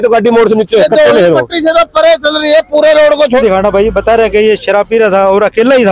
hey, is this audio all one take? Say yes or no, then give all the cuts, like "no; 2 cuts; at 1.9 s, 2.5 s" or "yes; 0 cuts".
no; 1 cut; at 3.4 s